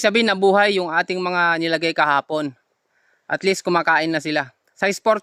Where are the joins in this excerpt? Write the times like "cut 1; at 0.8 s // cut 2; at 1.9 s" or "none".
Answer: none